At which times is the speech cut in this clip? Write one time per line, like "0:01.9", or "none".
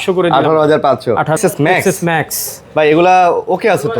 0:01.4